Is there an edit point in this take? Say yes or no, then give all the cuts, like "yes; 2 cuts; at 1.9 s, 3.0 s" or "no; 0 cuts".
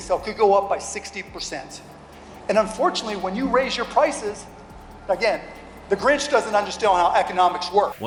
no; 0 cuts